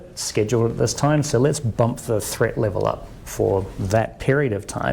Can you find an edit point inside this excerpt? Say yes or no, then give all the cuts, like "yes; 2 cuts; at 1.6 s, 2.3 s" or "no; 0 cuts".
no; 0 cuts